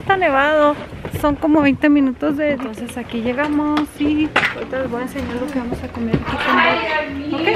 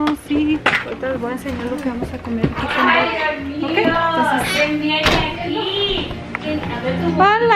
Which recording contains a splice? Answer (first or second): first